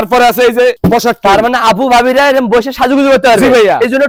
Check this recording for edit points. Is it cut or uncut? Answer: uncut